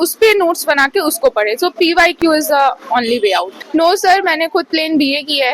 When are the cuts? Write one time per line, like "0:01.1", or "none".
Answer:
0:03.6